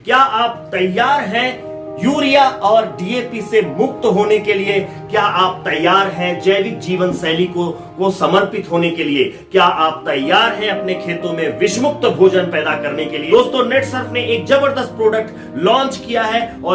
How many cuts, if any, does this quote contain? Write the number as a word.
zero